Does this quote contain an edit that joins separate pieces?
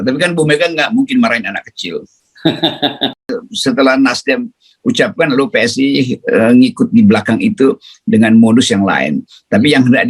yes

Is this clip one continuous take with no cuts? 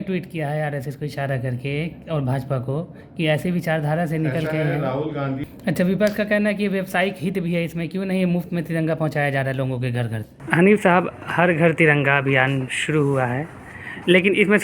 no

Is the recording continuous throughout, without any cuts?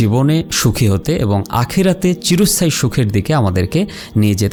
yes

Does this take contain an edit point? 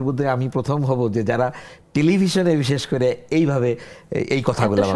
no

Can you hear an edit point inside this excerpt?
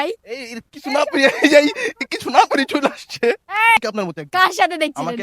yes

